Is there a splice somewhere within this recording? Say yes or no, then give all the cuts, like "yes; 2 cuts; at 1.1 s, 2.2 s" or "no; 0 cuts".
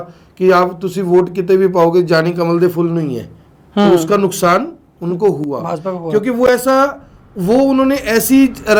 no; 0 cuts